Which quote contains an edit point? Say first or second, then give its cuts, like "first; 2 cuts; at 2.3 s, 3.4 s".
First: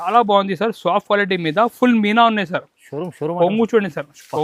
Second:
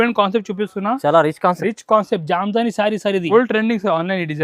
second; 1 cut; at 3.2 s